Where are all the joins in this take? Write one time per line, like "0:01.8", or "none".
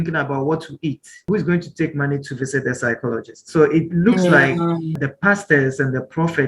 0:01.3
0:04.9